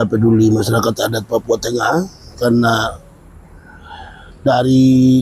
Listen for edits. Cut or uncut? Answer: uncut